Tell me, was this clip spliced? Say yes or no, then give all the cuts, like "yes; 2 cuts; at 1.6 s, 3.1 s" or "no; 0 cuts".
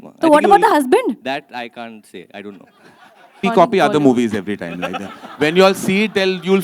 yes; 1 cut; at 3.4 s